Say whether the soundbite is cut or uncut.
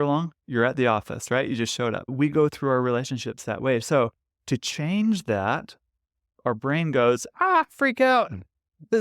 cut